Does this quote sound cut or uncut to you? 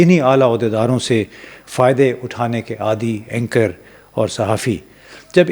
uncut